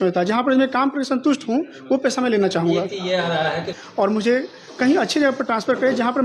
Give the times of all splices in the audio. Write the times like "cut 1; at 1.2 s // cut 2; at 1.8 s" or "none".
cut 1; at 3.7 s

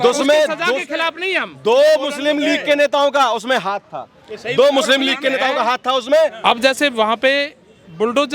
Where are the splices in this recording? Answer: cut 1; at 6.4 s

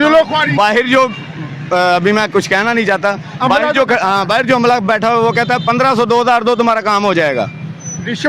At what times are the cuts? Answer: none

